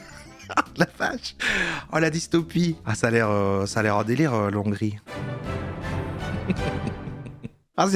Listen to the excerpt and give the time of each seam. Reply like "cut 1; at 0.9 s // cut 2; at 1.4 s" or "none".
cut 1; at 2.9 s // cut 2; at 5.0 s